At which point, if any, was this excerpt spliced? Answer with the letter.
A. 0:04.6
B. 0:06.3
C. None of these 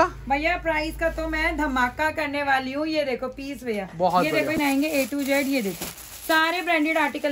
A